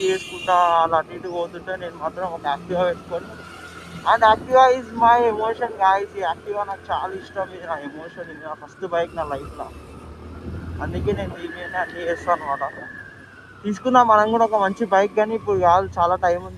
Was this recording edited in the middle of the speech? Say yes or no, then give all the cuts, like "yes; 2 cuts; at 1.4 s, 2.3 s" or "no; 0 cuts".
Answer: no; 0 cuts